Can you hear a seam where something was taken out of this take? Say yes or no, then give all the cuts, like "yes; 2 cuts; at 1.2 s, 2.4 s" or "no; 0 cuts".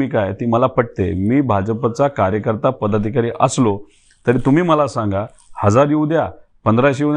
no; 0 cuts